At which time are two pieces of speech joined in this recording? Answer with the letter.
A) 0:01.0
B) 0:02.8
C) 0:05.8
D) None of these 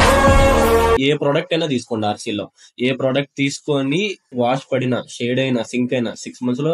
A